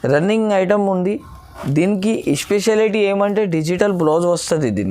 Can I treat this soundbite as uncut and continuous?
yes; 0 cuts

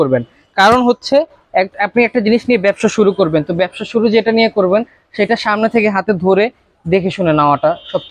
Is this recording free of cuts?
yes; 0 cuts

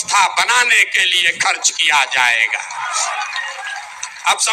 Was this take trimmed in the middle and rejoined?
no; 0 cuts

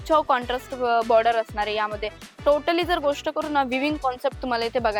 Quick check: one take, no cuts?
yes; 0 cuts

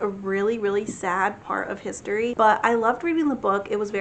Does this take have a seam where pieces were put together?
yes; 1 cut; at 2.3 s

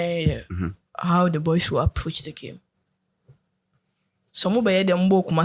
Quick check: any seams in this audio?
no; 0 cuts

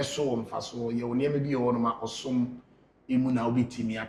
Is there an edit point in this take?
no; 0 cuts

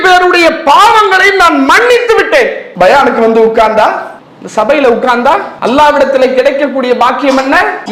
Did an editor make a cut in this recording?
no; 0 cuts

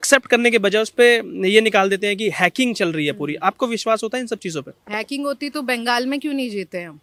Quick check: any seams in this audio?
no; 0 cuts

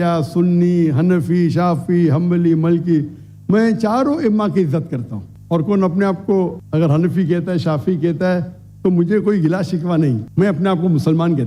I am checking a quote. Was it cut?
no; 0 cuts

